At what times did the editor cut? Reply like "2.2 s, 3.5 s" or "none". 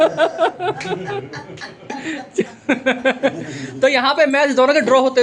none